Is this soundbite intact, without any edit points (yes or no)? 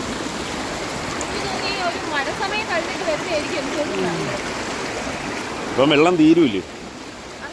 yes